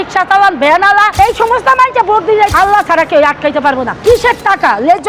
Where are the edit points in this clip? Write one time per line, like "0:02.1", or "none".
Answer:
0:02.5
0:03.9